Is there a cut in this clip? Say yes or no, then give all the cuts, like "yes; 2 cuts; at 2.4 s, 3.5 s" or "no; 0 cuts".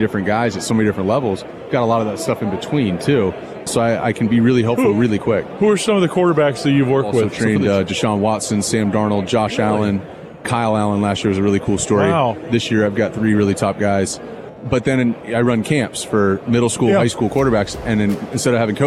yes; 5 cuts; at 3.7 s, 7.3 s, 10.4 s, 14.4 s, 15.6 s